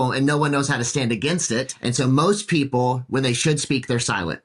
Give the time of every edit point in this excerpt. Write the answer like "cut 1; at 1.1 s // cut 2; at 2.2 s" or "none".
cut 1; at 1.7 s